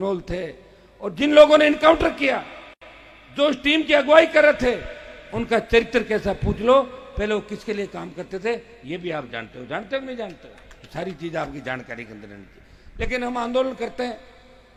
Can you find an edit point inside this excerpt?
no; 0 cuts

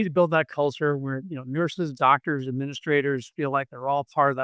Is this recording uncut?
yes; 0 cuts

